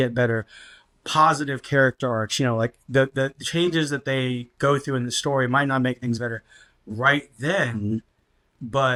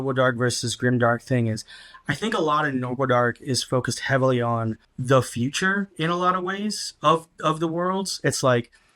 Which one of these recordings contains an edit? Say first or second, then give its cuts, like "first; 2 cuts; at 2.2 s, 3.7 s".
second; 1 cut; at 4.9 s